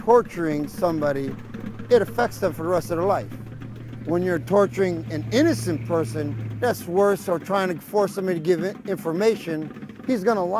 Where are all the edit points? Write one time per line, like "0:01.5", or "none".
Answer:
0:09.0